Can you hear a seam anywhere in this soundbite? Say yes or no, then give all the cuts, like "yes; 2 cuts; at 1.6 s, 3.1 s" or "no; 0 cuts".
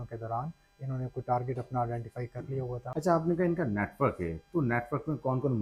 yes; 1 cut; at 2.9 s